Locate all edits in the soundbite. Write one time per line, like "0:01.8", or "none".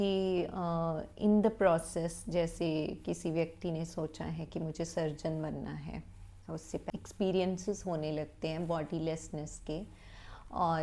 0:06.9